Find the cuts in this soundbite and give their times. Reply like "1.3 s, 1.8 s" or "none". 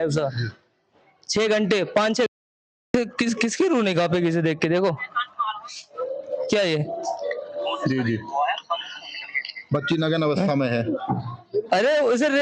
2.3 s